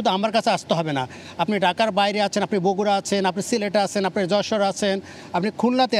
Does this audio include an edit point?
no; 0 cuts

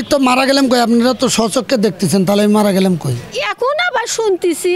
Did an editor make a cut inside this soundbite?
yes; 1 cut; at 3.3 s

